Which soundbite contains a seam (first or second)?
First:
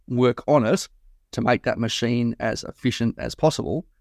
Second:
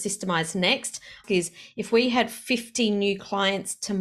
second